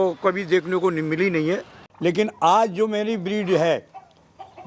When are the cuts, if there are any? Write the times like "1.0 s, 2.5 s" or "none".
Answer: 1.8 s